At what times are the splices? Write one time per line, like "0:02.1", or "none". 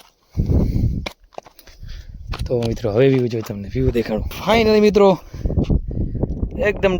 0:04.3